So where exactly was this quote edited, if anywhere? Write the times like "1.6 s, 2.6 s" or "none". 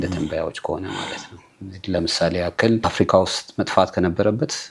2.9 s

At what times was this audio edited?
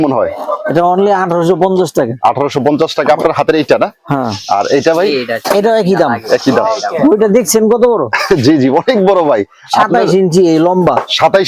none

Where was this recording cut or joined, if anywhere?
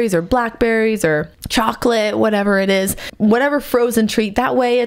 1.4 s, 3.1 s

